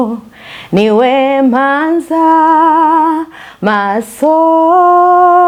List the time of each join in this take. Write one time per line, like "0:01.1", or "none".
none